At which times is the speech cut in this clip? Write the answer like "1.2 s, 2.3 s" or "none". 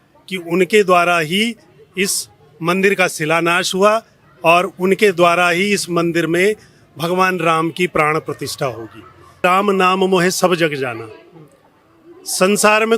9.4 s